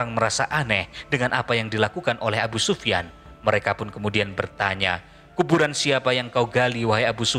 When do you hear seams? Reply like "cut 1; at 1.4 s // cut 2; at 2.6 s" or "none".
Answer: none